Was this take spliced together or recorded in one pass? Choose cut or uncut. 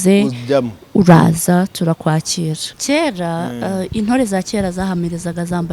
cut